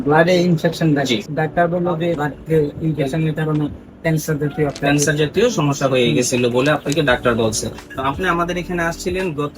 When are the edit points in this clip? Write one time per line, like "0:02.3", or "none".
0:01.3
0:02.2
0:07.8